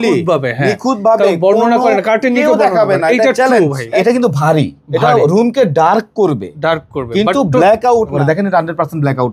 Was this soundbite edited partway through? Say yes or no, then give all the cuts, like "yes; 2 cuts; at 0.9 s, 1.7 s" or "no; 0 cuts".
yes; 2 cuts; at 3.9 s, 8.2 s